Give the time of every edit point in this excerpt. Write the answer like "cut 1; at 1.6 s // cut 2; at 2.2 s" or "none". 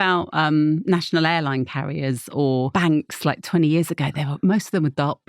cut 1; at 2.7 s